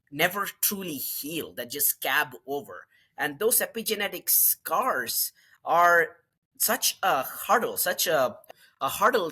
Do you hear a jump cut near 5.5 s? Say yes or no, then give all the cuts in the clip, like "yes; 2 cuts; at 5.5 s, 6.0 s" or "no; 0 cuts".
no; 1 cut; at 8.4 s